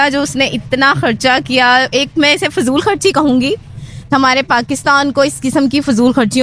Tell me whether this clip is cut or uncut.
uncut